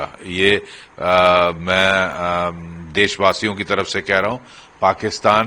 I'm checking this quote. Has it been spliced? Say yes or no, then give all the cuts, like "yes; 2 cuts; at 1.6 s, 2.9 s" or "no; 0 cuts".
no; 0 cuts